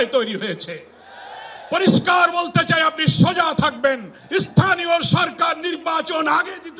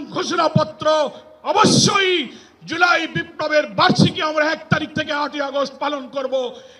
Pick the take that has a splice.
first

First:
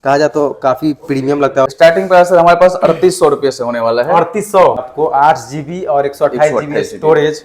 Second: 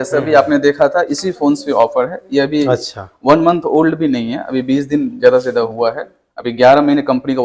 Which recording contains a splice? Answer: first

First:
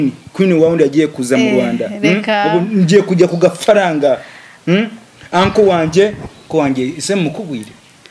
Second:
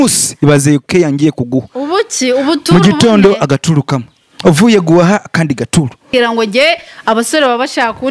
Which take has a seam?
second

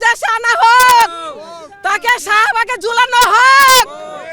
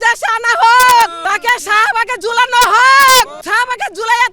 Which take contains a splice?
second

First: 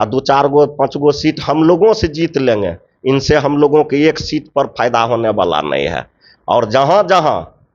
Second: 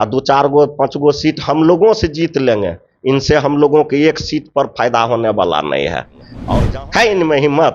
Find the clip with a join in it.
second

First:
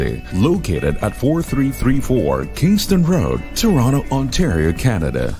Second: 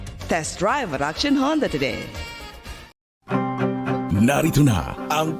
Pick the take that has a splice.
second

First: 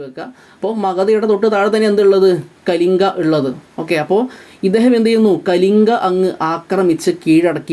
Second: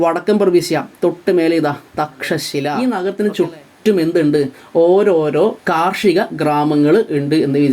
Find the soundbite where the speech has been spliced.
second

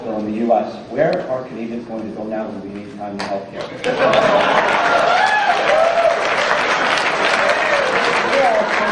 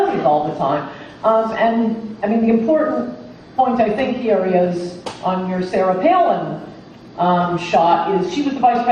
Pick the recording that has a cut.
second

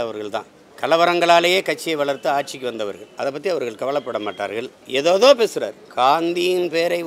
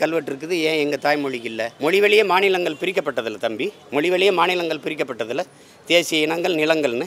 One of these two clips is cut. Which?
second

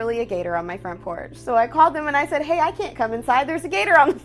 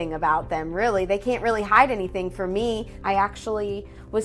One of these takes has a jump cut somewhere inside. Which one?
second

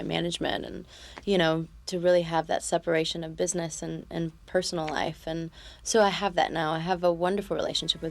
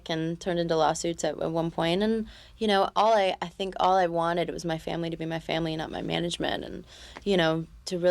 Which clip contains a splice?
first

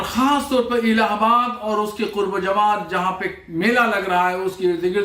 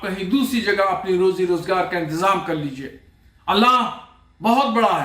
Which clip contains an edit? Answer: second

